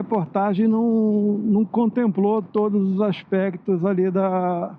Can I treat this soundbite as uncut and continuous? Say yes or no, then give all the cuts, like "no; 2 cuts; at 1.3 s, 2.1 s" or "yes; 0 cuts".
yes; 0 cuts